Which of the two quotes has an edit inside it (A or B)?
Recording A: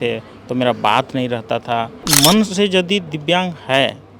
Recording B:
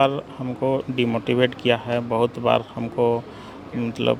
A